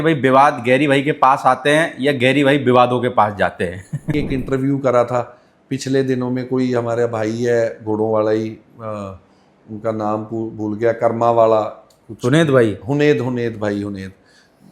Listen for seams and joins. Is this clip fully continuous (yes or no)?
no